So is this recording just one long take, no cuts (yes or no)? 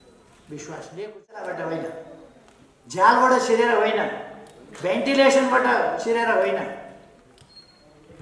no